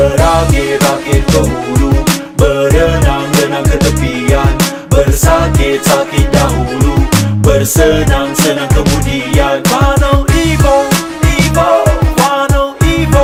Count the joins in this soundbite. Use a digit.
0